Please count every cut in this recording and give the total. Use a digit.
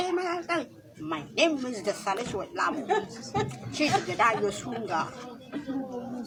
0